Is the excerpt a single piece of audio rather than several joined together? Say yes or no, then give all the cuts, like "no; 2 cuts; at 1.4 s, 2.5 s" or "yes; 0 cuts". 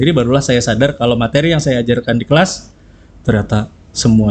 yes; 0 cuts